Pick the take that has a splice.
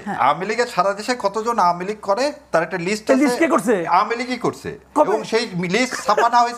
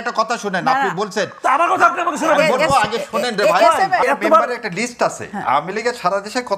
second; 1 cut; at 4.0 s

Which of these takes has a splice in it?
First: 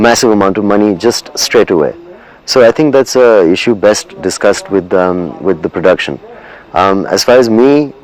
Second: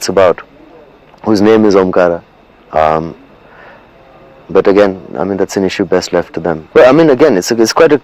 second; 1 cut; at 6.6 s

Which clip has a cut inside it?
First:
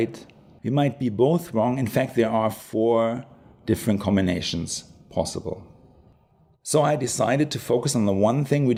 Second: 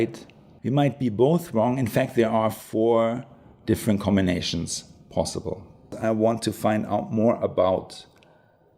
second; 1 cut; at 6.0 s

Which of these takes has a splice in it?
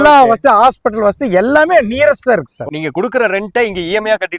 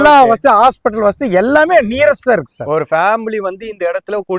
first; 1 cut; at 2.7 s

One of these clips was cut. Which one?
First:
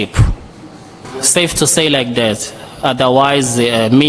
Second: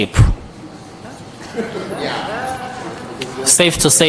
first; 1 cut; at 1.0 s

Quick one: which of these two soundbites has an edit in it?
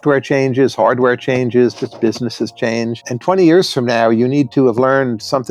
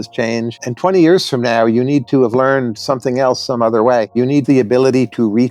second; 1 cut; at 4.2 s

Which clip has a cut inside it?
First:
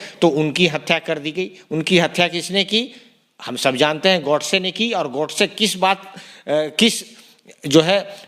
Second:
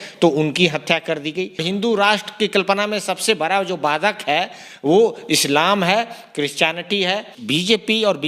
second; 2 cuts; at 1.6 s, 7.3 s

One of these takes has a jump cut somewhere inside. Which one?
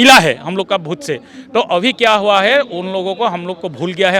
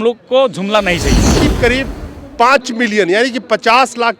second; 1 cut; at 1.4 s

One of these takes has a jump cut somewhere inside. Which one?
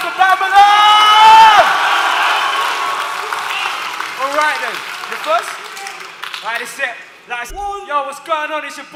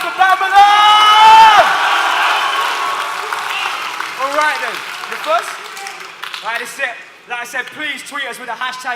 second; 1 cut; at 7.5 s

